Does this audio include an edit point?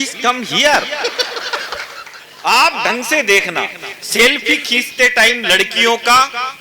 yes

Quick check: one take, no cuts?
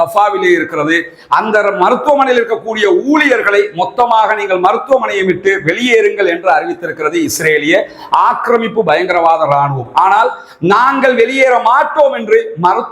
yes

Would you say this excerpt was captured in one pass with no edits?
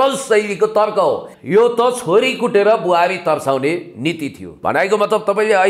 no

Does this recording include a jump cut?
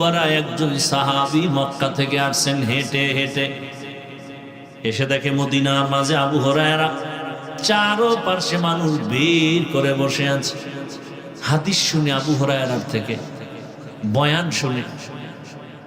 yes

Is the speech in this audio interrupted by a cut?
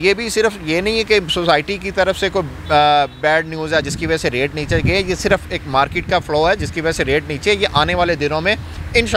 no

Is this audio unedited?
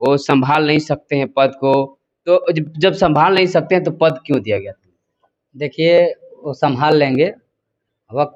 yes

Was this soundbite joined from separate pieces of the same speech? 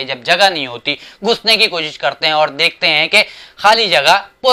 no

